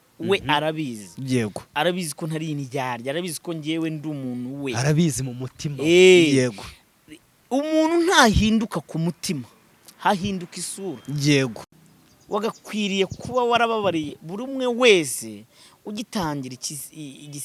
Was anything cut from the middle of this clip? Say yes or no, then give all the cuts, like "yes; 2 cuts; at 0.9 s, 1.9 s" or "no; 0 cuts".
yes; 1 cut; at 11.7 s